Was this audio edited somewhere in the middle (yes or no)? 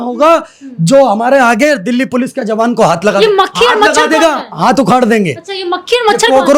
no